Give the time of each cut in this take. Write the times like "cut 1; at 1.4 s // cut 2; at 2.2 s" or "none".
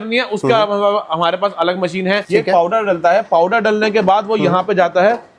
cut 1; at 2.2 s